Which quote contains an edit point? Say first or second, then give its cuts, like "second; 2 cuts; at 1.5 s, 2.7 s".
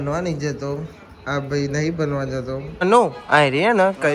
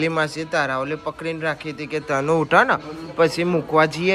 first; 1 cut; at 2.7 s